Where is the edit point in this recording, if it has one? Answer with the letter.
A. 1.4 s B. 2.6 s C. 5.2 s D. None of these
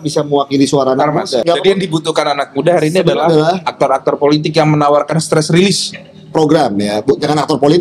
A